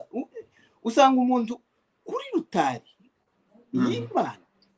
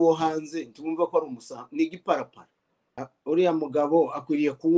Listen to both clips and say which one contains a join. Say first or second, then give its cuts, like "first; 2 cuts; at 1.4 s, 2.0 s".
second; 1 cut; at 3.1 s